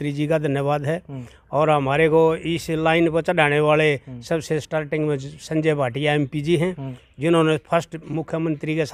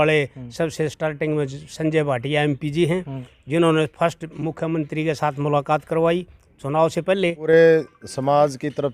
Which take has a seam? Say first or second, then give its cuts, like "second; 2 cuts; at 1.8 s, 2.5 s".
second; 1 cut; at 7.4 s